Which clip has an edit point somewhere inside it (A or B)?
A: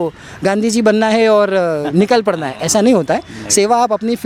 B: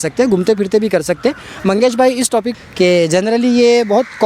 B